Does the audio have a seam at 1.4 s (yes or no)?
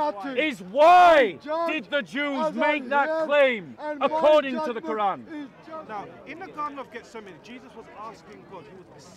no